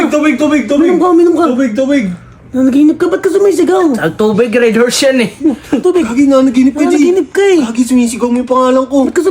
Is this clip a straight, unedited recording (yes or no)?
no